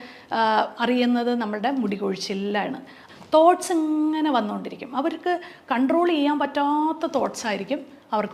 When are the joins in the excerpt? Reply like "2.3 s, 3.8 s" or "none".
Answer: 2.9 s

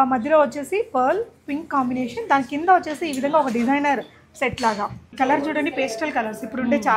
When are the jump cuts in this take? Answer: 5.0 s

